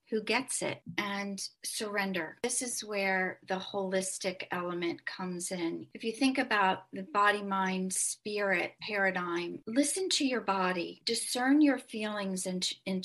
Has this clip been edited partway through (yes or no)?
yes